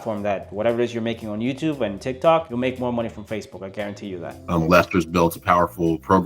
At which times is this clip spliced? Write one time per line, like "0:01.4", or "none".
0:04.4